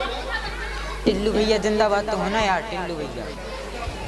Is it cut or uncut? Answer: uncut